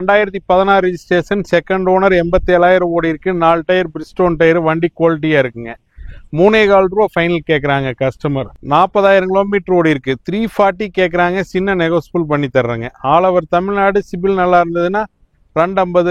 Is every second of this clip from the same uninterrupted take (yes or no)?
no